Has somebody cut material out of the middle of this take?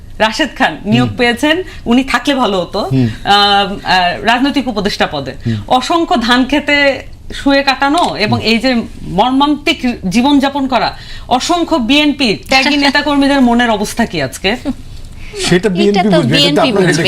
no; 0 cuts

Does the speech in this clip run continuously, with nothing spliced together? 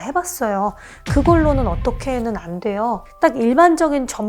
no; 1 cut; at 3.1 s

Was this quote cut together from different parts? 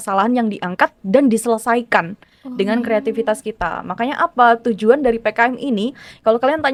no; 0 cuts

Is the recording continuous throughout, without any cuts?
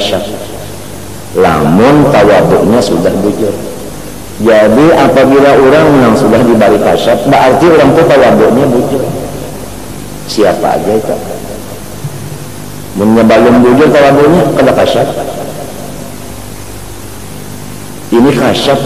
yes; 0 cuts

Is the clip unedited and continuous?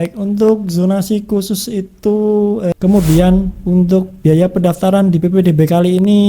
no; 1 cut; at 2.7 s

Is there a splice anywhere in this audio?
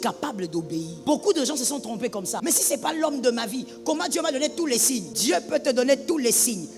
yes; 3 cuts; at 0.9 s, 2.3 s, 5.1 s

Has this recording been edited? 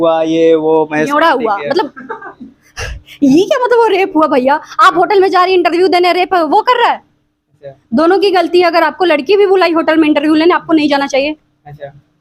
no; 0 cuts

